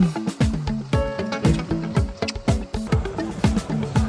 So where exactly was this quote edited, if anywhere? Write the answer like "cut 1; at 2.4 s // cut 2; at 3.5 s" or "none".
cut 1; at 2.8 s